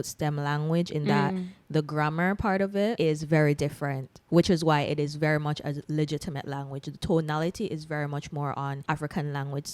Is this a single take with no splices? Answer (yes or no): no